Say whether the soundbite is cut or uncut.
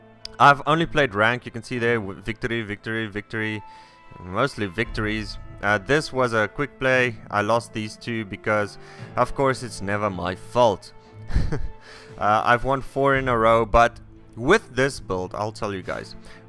cut